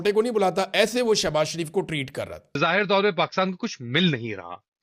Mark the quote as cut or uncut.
cut